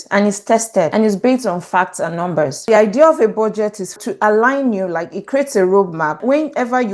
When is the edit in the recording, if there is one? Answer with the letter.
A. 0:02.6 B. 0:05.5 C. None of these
A